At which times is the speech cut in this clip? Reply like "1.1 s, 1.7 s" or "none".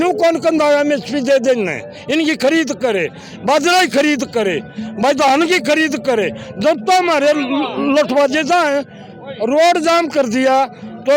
none